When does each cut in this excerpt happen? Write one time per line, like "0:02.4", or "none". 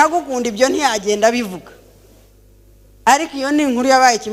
none